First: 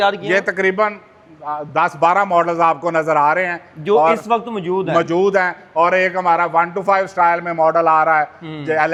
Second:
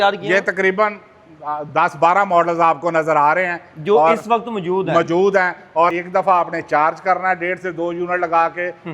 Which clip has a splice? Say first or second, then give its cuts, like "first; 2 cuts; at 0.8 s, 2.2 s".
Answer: second; 1 cut; at 5.9 s